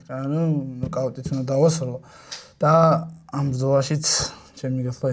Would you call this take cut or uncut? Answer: uncut